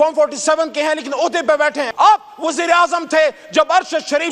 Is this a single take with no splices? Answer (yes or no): no